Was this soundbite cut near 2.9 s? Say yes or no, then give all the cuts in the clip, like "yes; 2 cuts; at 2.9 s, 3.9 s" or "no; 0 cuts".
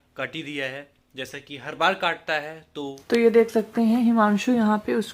yes; 1 cut; at 2.9 s